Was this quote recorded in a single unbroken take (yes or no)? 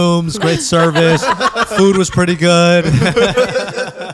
yes